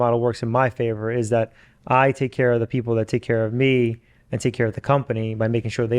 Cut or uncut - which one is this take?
uncut